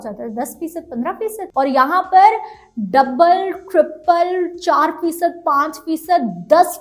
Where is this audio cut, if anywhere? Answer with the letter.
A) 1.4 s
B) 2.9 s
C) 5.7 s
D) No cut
A